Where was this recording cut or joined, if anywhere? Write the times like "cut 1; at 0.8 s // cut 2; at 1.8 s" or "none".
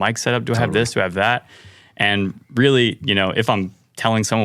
none